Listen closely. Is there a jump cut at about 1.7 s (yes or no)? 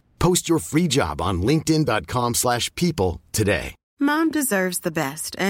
no